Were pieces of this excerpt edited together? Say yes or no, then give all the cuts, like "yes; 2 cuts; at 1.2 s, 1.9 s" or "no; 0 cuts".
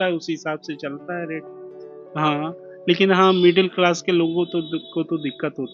no; 0 cuts